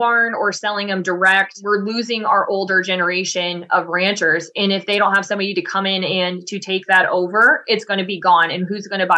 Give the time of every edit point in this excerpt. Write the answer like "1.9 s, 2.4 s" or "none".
1.6 s